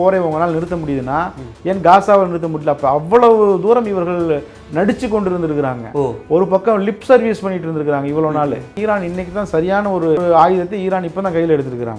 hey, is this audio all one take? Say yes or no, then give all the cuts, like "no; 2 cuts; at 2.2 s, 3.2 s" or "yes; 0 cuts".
no; 2 cuts; at 8.7 s, 10.2 s